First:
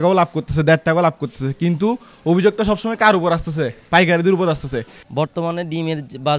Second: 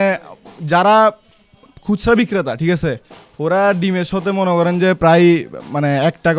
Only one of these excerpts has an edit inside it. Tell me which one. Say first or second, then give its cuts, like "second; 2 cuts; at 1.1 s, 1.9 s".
first; 1 cut; at 5.0 s